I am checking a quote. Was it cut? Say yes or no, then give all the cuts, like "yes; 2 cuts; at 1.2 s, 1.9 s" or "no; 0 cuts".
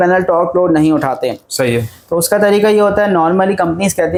no; 0 cuts